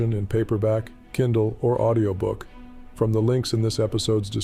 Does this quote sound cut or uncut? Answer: uncut